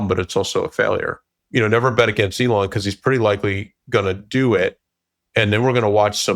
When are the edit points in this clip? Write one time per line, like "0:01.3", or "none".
0:01.3

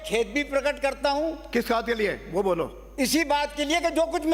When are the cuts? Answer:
none

